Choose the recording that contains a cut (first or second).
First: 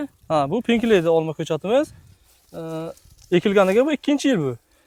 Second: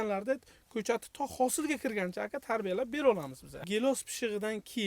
second